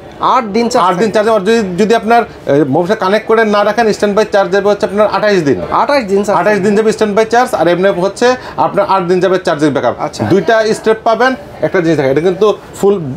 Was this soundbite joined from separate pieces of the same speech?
no; 0 cuts

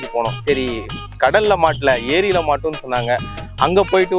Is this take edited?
no; 0 cuts

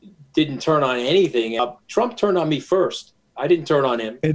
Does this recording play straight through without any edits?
no; 1 cut; at 1.6 s

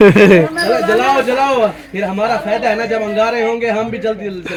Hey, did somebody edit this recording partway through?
no; 0 cuts

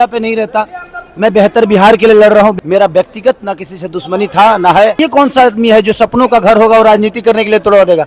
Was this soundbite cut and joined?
yes; 2 cuts; at 2.6 s, 5.0 s

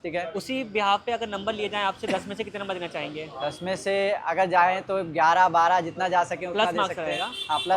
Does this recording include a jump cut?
no; 0 cuts

